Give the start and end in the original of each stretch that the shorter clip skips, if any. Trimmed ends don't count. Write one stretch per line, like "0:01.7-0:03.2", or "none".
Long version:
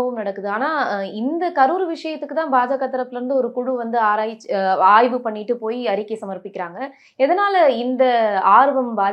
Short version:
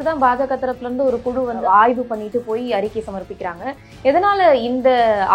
0:03.9-0:04.7

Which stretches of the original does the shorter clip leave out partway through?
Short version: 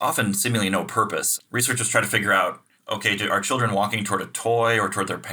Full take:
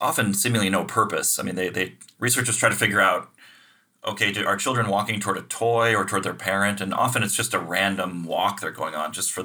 0:01.3-0:02.0
0:03.4-0:03.9

